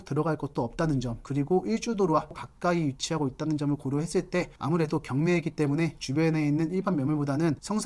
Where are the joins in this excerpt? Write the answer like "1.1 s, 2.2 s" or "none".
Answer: 2.4 s